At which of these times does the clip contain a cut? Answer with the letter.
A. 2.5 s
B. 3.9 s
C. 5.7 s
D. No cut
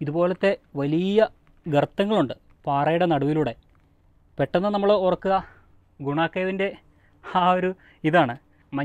D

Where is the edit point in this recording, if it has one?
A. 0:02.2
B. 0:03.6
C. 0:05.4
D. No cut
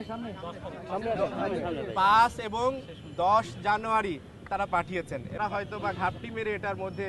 C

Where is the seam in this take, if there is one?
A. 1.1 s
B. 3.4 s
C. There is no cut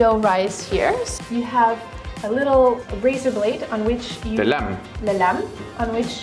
A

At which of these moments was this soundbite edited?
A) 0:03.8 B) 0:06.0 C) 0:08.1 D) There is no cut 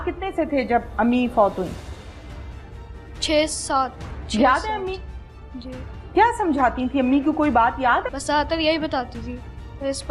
C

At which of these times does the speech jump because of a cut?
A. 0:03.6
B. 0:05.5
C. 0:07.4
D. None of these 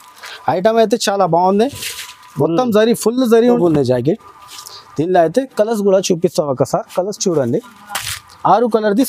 A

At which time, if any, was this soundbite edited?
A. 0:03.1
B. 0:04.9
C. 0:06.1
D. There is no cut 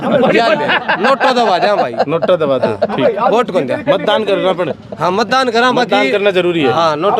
D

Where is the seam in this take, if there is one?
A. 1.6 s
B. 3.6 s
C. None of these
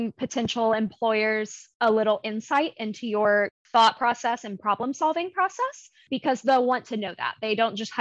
B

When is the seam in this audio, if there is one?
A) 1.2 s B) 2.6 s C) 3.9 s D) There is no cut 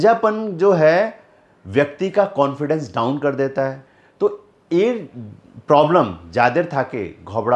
C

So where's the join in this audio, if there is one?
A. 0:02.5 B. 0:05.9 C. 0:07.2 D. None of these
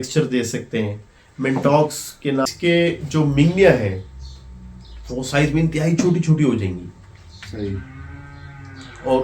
A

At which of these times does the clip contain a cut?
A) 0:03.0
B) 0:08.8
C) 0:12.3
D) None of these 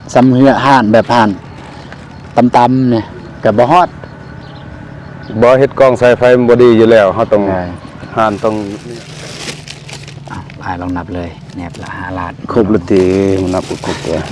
B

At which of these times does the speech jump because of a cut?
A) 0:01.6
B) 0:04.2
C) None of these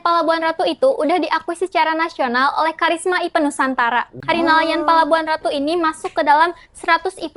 B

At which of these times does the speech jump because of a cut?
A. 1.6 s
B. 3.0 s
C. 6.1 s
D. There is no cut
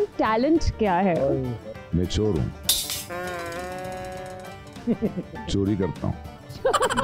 A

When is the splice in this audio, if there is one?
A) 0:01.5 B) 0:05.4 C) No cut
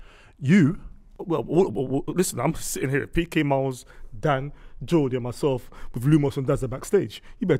C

